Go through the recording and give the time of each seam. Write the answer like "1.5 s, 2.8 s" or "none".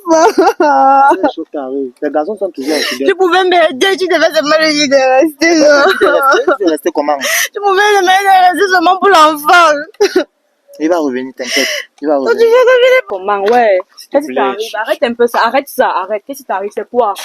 13.1 s